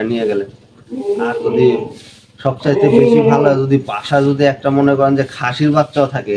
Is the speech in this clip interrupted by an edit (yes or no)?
no